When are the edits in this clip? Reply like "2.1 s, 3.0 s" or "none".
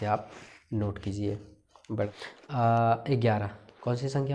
2.1 s